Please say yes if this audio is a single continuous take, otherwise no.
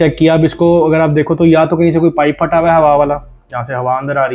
yes